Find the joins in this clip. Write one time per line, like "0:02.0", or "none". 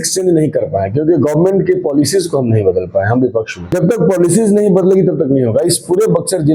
0:03.6